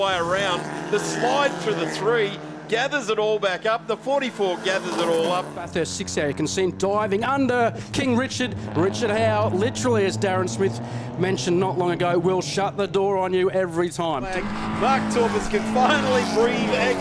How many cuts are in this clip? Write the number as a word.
two